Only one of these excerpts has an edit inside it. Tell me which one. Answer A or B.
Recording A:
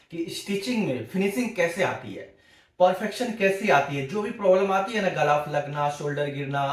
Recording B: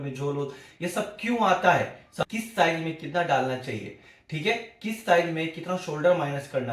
B